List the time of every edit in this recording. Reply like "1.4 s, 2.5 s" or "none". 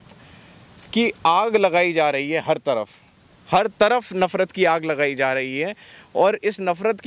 none